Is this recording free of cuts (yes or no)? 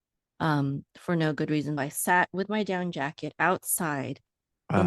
no